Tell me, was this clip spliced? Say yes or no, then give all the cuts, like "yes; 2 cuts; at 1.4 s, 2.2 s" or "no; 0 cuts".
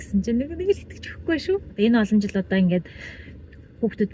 yes; 1 cut; at 1.7 s